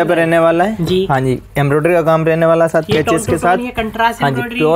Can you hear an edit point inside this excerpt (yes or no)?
no